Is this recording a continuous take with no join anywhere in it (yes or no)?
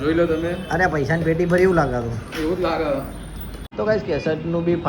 no